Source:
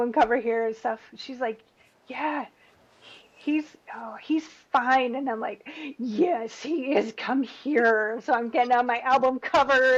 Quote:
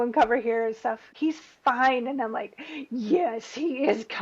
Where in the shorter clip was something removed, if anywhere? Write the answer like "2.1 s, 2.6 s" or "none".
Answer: 1.1 s